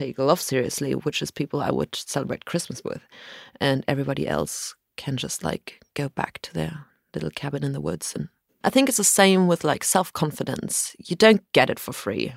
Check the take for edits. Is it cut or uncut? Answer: cut